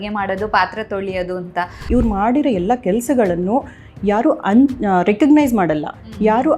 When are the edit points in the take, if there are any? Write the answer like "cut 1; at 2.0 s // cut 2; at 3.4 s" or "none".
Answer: cut 1; at 1.8 s